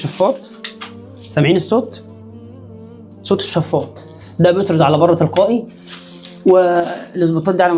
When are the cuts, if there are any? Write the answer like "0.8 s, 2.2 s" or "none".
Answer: none